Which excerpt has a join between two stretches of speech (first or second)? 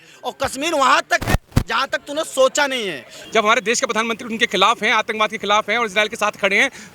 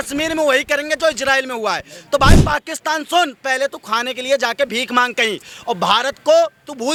first